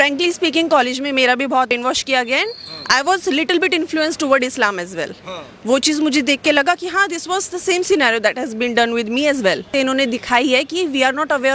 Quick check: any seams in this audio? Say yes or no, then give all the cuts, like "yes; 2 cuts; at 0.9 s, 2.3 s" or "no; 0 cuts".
yes; 2 cuts; at 1.7 s, 9.7 s